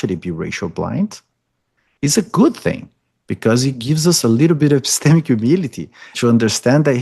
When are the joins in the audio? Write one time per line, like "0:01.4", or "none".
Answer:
0:06.1